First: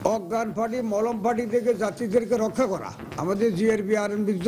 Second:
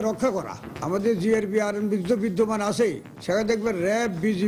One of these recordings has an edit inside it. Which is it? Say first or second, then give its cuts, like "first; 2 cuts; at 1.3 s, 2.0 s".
second; 1 cut; at 3.1 s